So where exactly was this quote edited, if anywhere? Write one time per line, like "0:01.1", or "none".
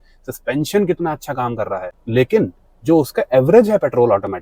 0:02.0